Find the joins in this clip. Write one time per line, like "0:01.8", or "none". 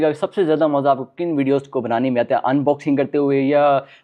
none